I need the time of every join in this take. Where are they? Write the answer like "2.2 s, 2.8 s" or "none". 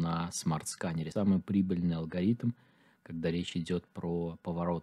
1.1 s